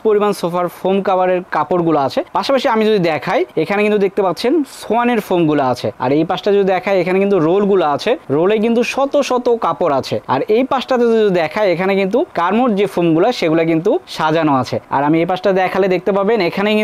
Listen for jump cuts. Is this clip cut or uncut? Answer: cut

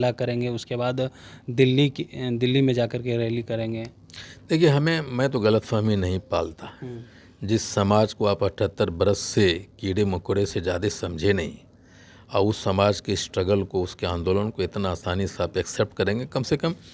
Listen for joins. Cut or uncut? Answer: uncut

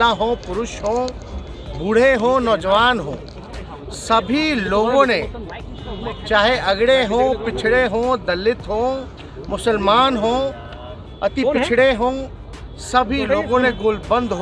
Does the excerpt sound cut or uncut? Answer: uncut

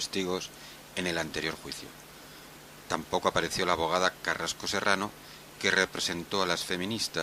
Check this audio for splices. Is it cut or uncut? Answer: uncut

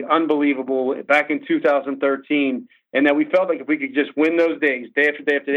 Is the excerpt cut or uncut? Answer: uncut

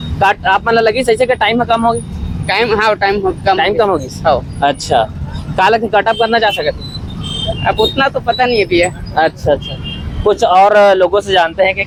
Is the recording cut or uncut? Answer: uncut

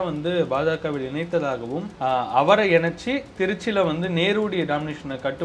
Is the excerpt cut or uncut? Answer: cut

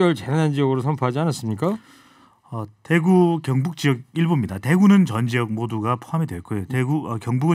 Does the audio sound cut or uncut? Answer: uncut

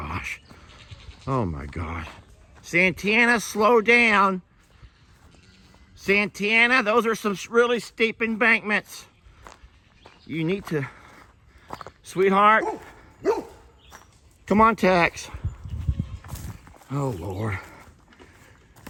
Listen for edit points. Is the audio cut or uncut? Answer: uncut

